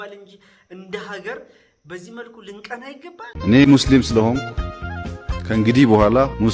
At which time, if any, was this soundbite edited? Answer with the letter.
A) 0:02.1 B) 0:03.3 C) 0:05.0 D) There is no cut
B